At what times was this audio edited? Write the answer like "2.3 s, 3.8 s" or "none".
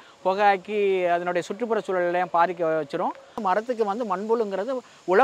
3.3 s